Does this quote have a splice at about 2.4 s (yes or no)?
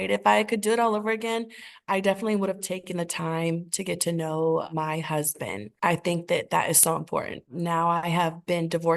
no